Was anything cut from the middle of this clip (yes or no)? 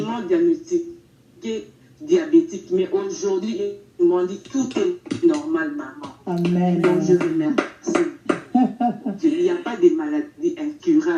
no